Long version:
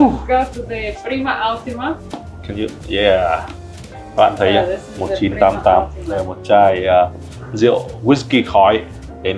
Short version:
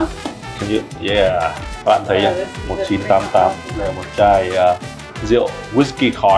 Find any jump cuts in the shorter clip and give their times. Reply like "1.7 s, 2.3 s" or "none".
1.7 s

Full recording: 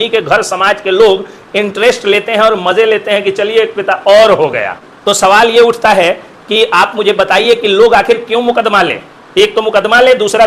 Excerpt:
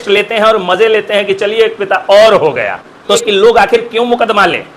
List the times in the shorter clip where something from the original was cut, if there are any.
3.2 s

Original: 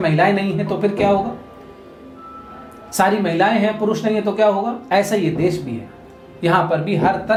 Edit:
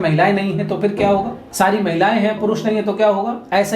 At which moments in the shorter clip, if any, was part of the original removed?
1.4 s

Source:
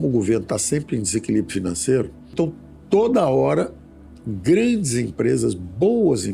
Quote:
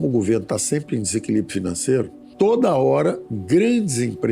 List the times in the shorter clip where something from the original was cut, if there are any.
2.2 s, 3.3 s

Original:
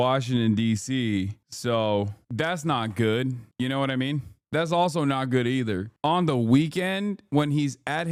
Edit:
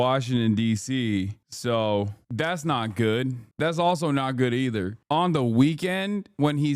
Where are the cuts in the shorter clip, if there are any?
3.4 s

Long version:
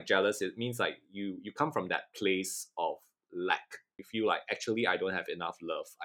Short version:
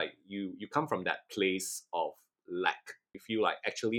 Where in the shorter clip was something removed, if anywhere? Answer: none

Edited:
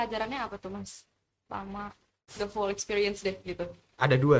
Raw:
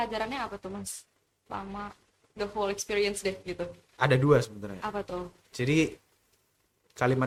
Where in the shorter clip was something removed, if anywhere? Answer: none

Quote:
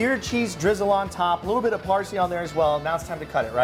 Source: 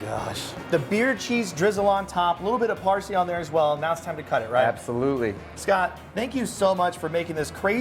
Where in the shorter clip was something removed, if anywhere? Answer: none

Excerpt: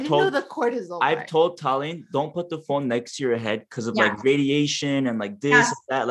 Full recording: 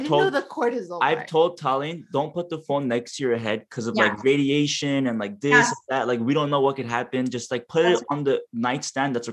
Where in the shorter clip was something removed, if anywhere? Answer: none

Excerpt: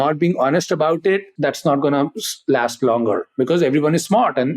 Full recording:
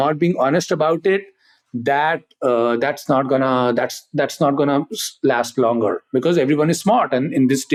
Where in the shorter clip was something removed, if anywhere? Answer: 1.3 s

